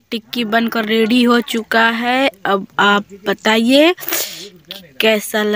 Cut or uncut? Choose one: uncut